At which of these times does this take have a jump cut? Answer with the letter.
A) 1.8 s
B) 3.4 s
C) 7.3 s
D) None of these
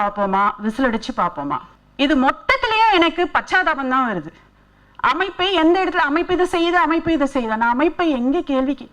A